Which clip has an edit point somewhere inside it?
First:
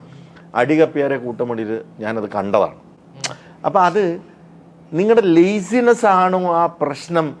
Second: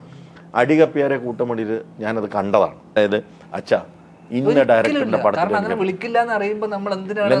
second; 1 cut; at 3.0 s

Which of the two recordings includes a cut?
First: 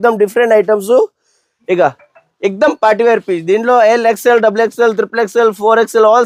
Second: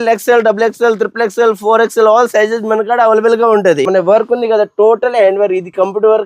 second; 1 cut; at 3.9 s

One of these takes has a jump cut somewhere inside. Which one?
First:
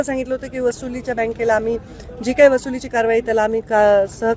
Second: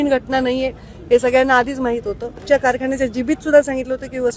second; 1 cut; at 2.4 s

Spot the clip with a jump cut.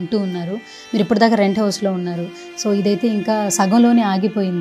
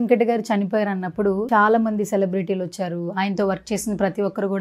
second; 1 cut; at 1.4 s

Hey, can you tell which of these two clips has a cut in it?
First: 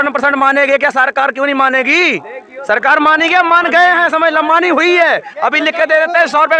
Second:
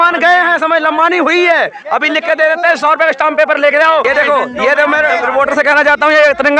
second; 1 cut; at 4.0 s

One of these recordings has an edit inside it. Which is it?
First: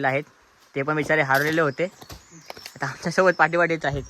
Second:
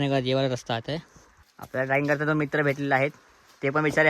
second; 1 cut; at 1.6 s

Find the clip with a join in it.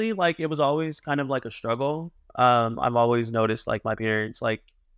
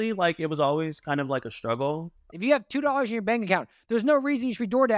second; 1 cut; at 2.2 s

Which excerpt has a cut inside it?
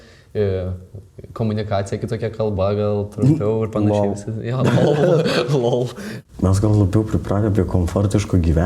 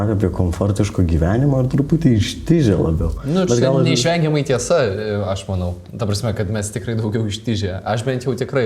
first; 1 cut; at 6.2 s

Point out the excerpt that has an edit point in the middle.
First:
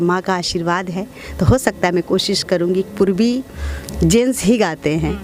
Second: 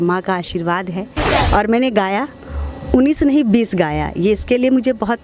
second; 1 cut; at 1.2 s

